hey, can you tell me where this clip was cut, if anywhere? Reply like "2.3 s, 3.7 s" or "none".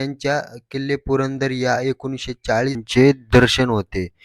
2.8 s